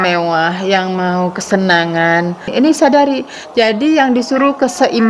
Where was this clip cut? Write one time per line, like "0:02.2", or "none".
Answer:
0:02.5